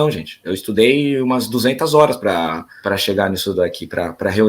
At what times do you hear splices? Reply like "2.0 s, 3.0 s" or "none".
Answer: 2.7 s